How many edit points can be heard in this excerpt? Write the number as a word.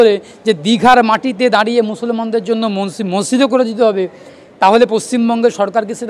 zero